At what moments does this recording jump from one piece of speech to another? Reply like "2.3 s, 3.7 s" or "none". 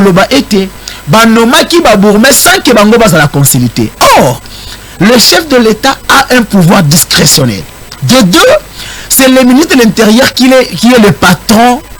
none

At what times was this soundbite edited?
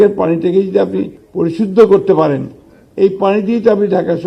1.2 s

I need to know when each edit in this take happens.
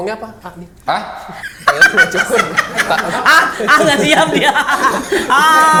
none

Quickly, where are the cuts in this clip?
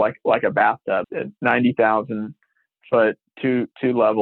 1.0 s

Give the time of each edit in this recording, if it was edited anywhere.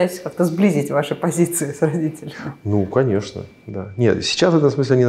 none

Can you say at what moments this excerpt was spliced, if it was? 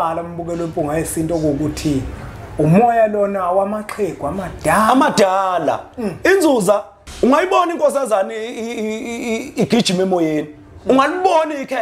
7.0 s

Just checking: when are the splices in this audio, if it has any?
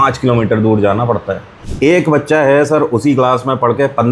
1.6 s

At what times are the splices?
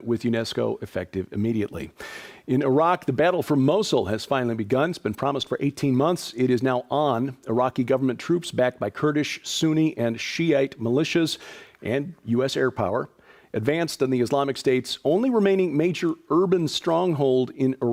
none

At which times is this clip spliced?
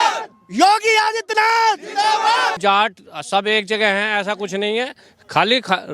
2.6 s

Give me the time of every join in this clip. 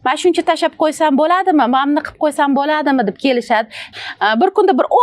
3.9 s

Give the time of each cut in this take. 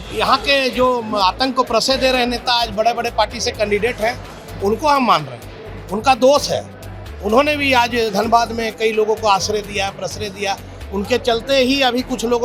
none

